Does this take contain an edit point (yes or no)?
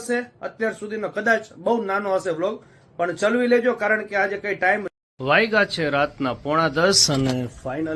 yes